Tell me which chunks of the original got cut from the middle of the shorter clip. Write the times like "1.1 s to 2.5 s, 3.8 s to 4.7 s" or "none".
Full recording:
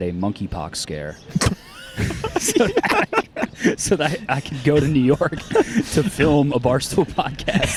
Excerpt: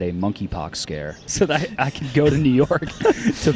1.3 s to 3.8 s